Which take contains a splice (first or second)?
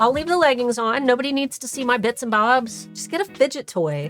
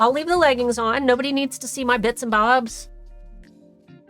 first